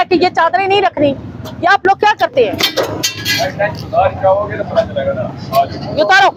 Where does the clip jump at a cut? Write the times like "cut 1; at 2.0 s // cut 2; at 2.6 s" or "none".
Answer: none